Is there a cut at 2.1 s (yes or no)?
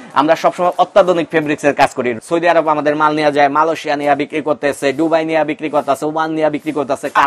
yes